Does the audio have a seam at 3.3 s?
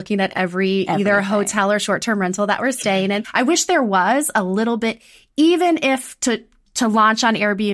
yes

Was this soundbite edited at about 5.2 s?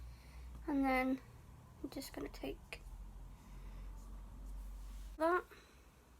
yes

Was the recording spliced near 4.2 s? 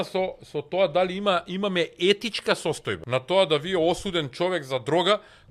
no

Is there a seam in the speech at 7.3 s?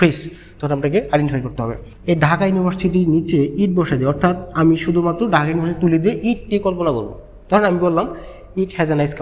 no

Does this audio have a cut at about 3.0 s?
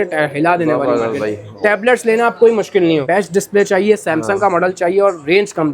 yes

